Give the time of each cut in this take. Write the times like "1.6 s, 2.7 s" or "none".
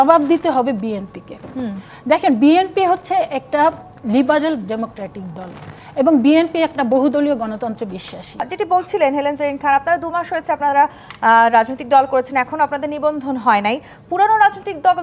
8.5 s